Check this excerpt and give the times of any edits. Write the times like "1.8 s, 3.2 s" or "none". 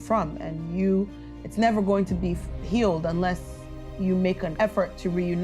4.5 s